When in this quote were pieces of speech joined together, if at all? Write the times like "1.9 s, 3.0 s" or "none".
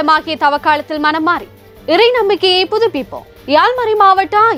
none